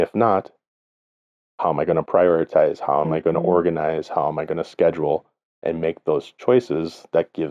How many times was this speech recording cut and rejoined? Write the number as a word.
zero